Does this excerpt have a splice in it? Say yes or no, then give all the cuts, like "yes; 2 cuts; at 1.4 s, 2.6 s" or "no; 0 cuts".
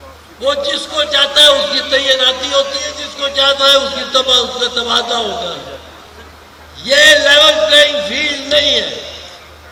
no; 0 cuts